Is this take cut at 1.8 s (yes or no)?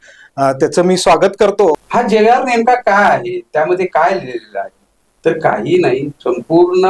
yes